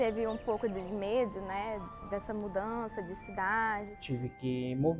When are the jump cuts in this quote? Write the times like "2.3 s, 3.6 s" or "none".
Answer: 3.9 s

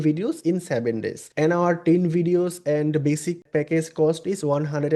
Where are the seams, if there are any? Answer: 1.2 s, 3.4 s

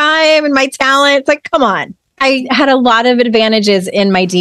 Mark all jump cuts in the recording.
2.3 s

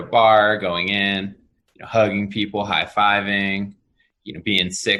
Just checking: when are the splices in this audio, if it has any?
none

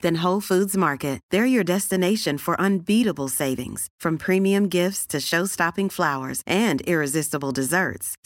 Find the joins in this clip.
none

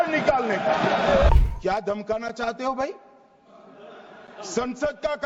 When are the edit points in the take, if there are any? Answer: 1.3 s

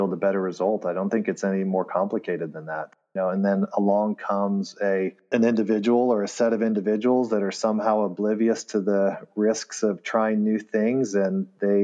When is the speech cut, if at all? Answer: none

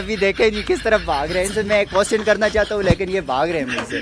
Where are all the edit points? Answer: none

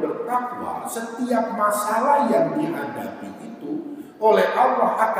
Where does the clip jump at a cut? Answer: none

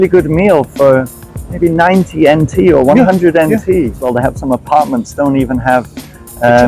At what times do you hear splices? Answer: 4.0 s

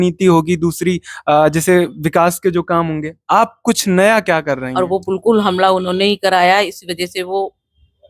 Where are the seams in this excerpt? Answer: 4.7 s

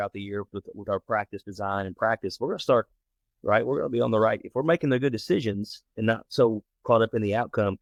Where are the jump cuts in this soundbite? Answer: none

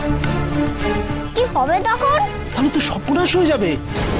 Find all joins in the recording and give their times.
2.4 s

